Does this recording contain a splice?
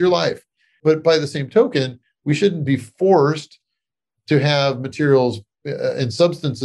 no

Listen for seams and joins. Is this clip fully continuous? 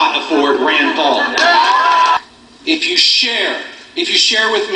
no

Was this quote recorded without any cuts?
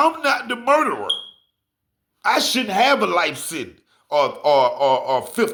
yes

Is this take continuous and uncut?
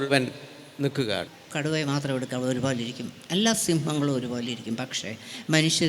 no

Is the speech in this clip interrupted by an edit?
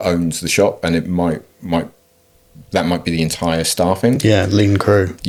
no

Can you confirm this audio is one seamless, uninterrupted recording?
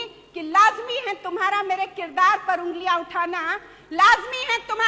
yes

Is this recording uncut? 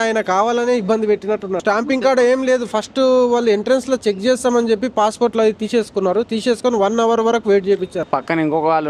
no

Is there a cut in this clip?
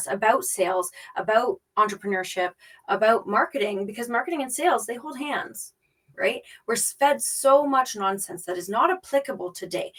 no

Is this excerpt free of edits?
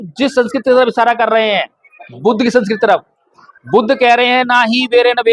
yes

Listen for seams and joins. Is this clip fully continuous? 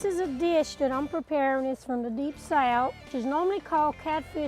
no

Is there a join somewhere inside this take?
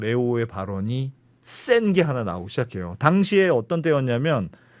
no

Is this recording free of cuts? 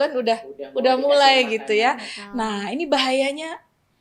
yes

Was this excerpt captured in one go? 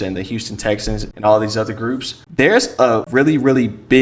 no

